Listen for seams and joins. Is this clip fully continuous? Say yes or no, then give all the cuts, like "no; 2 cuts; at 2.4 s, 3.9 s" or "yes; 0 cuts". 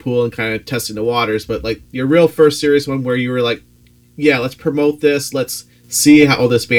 yes; 0 cuts